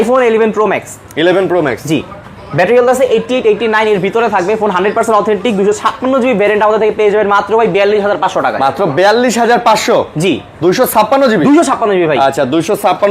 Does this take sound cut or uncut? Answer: uncut